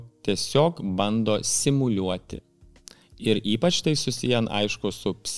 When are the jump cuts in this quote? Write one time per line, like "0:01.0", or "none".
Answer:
none